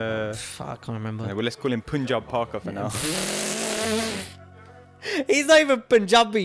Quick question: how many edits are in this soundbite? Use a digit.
0